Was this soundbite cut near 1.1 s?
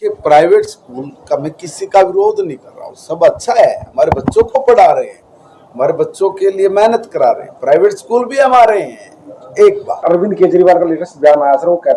no; 2 cuts; at 7.8 s, 10.0 s

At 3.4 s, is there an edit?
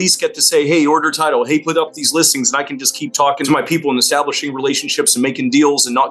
yes; 1 cut; at 3.4 s

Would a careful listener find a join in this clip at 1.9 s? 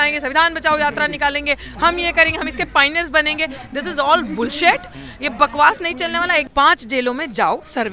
no; 1 cut; at 6.5 s

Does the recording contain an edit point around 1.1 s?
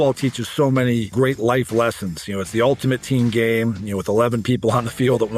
yes; 1 cut; at 1.1 s

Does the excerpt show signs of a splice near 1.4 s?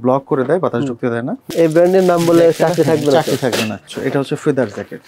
yes; 2 cuts; at 1.4 s, 3.9 s

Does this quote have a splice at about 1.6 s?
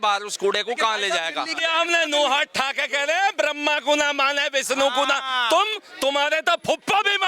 yes; 1 cut; at 1.6 s

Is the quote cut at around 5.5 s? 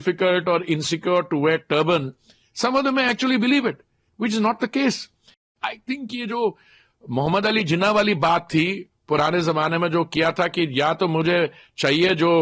yes; 1 cut; at 5.5 s

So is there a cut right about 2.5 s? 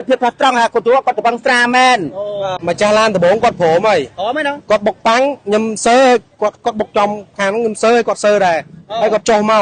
yes; 1 cut; at 2.5 s

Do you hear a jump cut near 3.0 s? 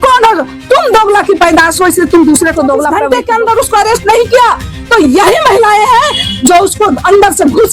yes; 1 cut; at 3.0 s

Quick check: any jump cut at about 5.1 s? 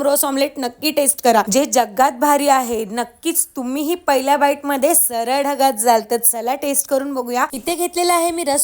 no; 1 cut; at 7.5 s

